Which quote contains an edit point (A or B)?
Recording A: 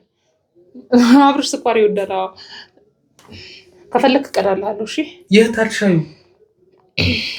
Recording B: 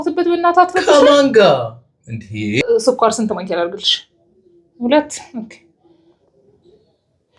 B